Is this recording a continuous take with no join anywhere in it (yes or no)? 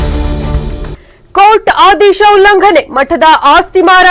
no